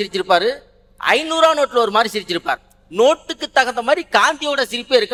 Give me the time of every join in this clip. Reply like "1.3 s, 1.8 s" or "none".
none